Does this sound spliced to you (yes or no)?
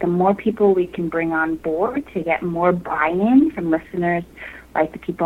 no